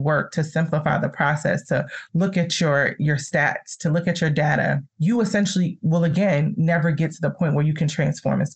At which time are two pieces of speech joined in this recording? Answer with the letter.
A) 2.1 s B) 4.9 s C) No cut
B